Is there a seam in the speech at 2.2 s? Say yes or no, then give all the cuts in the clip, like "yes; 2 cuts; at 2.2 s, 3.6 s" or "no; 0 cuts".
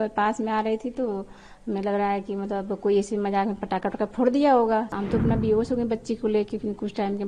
no; 1 cut; at 4.9 s